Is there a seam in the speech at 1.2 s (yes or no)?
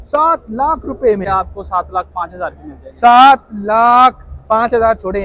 yes